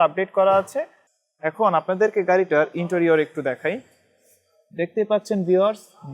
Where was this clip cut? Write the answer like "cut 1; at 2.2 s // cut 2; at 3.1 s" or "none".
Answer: cut 1; at 1.0 s